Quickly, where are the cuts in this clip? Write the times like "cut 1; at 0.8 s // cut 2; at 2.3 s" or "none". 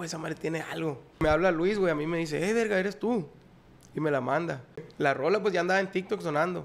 cut 1; at 1.2 s // cut 2; at 4.8 s